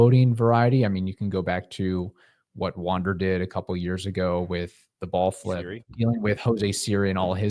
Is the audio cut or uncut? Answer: cut